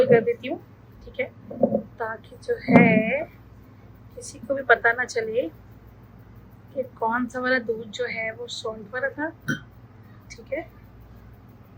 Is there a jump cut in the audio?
yes; 1 cut; at 1.0 s

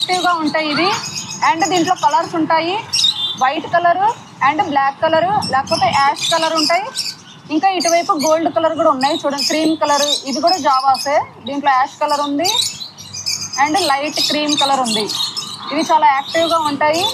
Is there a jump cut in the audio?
no; 0 cuts

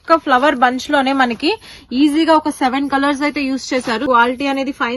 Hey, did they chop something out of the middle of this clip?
yes; 1 cut; at 4.0 s

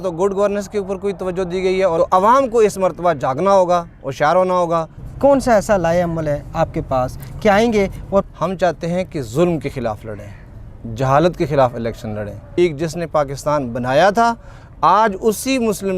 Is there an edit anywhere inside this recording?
yes; 4 cuts; at 1.9 s, 5.0 s, 8.2 s, 12.5 s

